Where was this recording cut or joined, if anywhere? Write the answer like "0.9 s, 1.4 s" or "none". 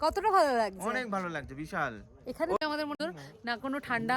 2.6 s